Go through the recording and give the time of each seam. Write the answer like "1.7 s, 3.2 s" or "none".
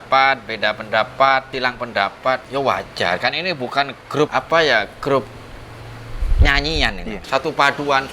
1.9 s, 4.3 s, 7.2 s